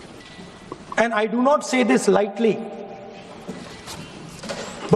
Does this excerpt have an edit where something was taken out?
no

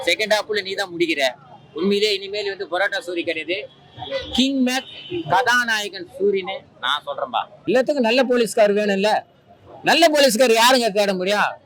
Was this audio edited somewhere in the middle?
yes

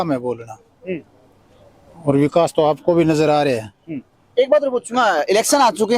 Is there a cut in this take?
no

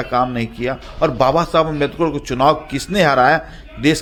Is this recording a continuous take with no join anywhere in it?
yes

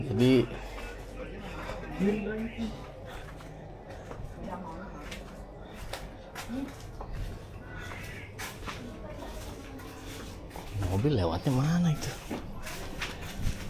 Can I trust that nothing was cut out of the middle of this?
yes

